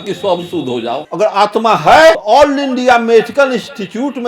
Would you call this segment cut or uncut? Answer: cut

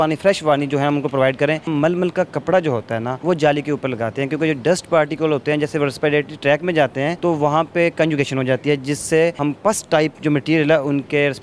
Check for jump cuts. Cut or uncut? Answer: cut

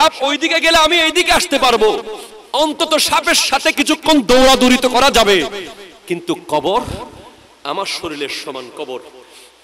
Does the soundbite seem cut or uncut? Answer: uncut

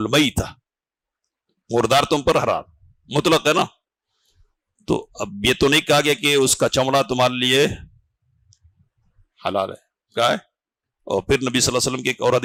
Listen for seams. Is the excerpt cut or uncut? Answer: uncut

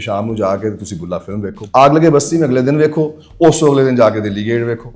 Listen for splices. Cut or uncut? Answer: cut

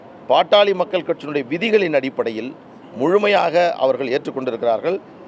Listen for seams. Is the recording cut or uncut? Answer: uncut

